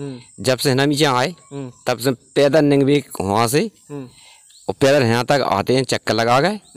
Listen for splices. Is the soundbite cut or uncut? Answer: uncut